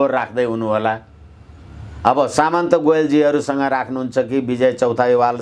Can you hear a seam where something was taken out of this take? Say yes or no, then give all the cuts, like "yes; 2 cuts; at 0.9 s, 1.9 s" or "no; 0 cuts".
no; 0 cuts